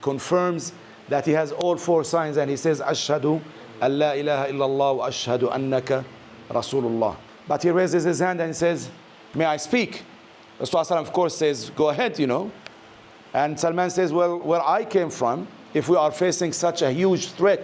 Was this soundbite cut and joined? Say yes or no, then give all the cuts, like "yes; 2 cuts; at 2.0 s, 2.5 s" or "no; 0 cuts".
yes; 1 cut; at 7.3 s